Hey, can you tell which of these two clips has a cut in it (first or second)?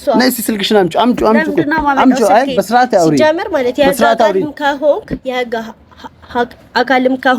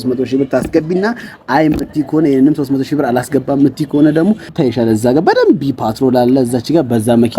second